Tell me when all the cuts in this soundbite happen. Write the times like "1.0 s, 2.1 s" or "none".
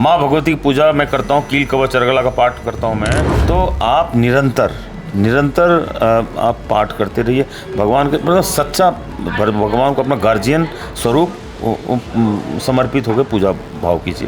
3.3 s